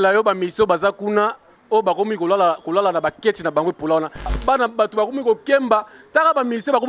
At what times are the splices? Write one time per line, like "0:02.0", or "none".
0:04.3